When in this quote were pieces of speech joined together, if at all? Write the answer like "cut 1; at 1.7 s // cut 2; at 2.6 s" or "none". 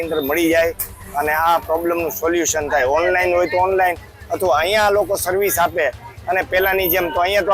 none